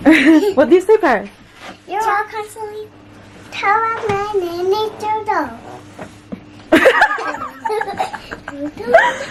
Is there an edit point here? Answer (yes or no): no